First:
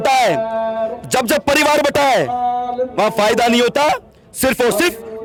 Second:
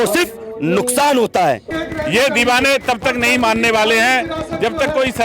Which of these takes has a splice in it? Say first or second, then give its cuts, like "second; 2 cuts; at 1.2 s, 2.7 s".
second; 1 cut; at 1.7 s